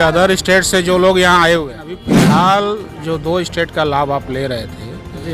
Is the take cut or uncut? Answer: cut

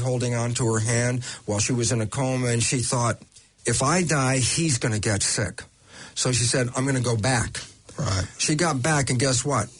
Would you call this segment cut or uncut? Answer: uncut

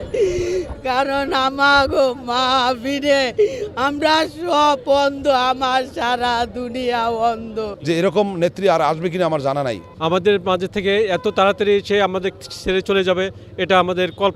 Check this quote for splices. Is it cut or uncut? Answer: cut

